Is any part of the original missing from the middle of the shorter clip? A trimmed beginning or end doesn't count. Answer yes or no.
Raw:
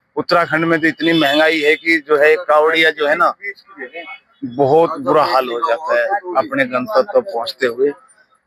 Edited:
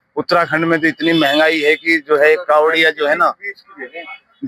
no